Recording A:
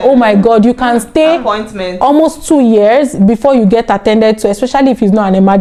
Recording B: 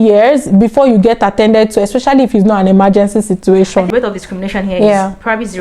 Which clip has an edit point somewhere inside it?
B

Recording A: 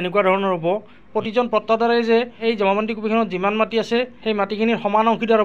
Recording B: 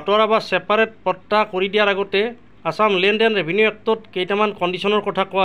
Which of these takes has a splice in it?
A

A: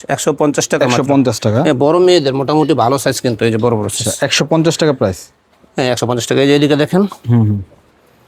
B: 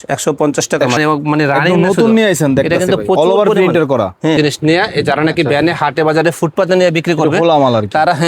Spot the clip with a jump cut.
B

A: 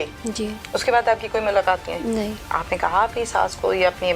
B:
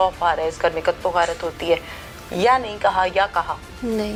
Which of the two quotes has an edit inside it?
A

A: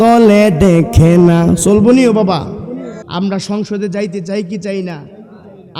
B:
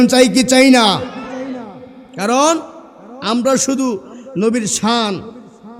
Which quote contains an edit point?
A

